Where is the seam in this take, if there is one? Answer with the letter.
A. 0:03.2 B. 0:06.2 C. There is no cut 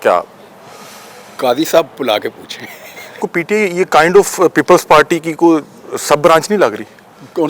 A